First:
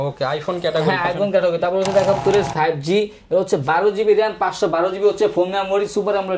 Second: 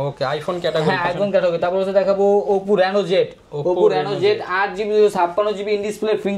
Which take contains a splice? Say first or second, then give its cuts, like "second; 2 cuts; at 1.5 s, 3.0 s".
first; 1 cut; at 2.2 s